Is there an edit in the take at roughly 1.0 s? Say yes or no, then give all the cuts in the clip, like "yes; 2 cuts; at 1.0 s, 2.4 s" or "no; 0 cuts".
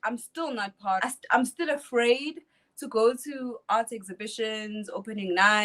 yes; 1 cut; at 1.0 s